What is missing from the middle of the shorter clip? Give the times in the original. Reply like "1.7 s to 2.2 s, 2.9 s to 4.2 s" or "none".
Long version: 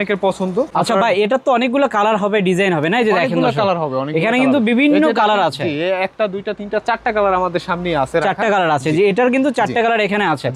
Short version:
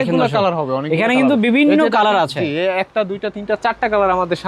none